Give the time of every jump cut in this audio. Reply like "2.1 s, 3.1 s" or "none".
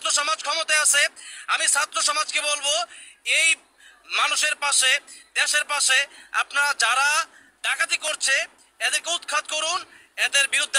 none